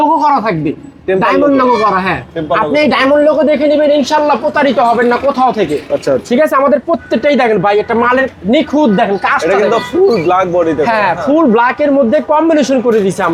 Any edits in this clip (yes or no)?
no